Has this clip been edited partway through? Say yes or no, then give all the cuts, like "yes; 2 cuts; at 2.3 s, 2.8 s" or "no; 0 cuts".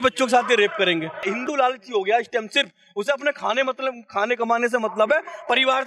no; 0 cuts